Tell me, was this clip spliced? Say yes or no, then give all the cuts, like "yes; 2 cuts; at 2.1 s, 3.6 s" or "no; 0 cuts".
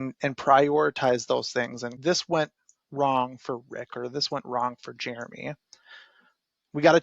yes; 1 cut; at 1.9 s